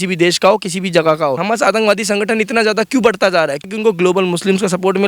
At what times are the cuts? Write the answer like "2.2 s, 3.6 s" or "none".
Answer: 1.4 s, 3.7 s